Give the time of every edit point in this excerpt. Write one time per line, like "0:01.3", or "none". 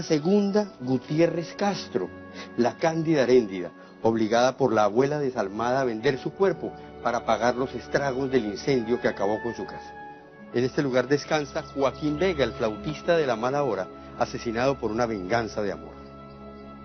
0:09.1